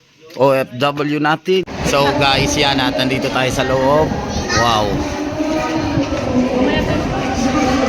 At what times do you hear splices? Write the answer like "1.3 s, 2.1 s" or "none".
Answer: 1.6 s